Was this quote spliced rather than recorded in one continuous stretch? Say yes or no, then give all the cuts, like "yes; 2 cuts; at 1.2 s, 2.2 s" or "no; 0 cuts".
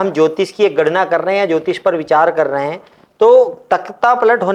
no; 0 cuts